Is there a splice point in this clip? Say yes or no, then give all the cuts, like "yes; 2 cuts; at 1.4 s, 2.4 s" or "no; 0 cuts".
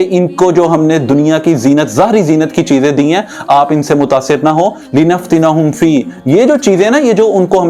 no; 0 cuts